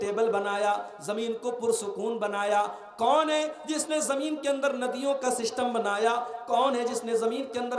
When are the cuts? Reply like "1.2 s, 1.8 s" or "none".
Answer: none